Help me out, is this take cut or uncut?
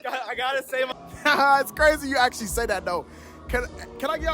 cut